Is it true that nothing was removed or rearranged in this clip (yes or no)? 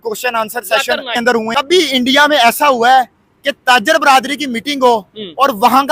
no